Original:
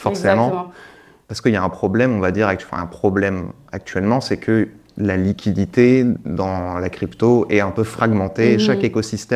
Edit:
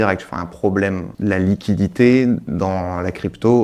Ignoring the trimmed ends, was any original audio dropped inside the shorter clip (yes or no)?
yes